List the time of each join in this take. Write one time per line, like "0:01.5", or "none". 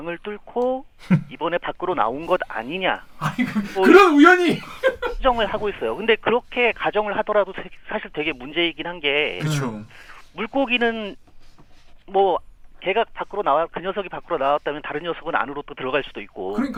none